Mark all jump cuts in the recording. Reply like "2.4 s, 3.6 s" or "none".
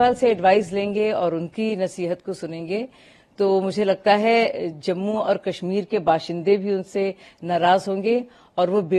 none